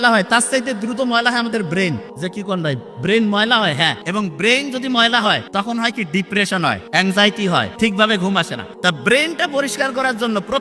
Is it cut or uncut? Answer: cut